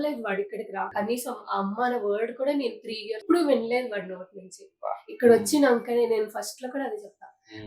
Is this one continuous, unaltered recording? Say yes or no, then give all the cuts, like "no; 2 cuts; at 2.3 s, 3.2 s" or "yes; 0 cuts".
no; 2 cuts; at 0.9 s, 3.2 s